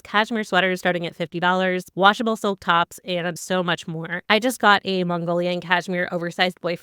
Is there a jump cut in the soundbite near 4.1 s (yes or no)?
yes